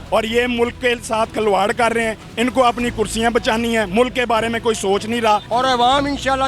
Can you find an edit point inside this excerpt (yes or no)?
yes